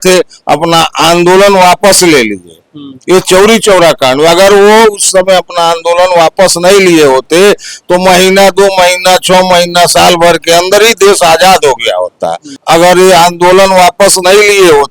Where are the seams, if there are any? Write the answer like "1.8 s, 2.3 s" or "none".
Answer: 12.5 s